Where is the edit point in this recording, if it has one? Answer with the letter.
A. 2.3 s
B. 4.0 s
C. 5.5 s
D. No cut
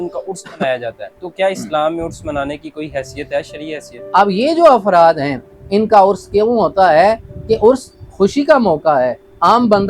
B